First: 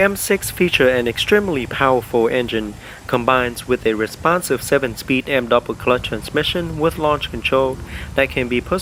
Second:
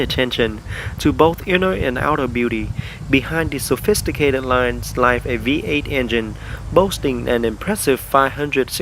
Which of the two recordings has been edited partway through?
second; 1 cut; at 7.7 s

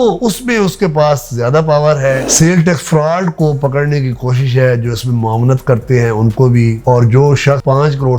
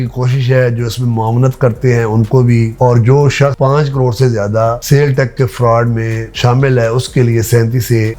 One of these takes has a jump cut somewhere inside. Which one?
first; 1 cut; at 2.2 s

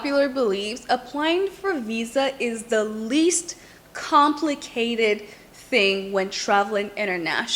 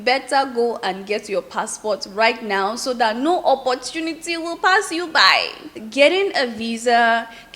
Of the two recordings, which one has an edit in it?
second; 1 cut; at 5.6 s

